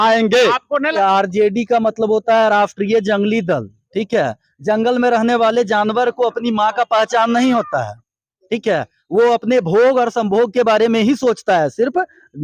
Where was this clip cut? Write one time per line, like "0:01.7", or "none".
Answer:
0:00.9